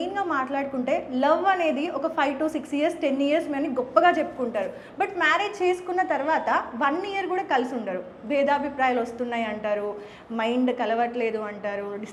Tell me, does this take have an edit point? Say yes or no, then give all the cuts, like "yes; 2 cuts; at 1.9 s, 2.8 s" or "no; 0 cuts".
no; 0 cuts